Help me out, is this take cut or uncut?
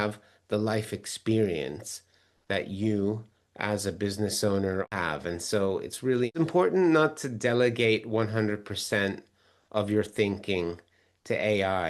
cut